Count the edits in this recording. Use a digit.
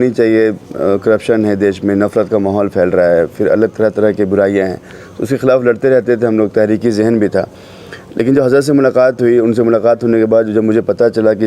0